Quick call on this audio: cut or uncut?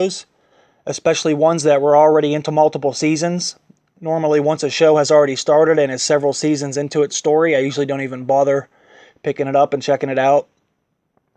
cut